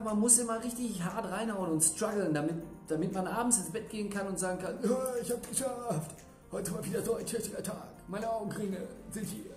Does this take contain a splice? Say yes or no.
no